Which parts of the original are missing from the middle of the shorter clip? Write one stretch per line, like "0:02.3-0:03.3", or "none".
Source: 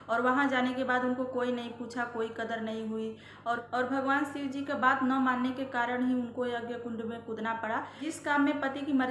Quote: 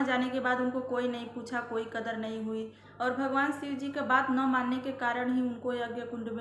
0:03.3-0:03.6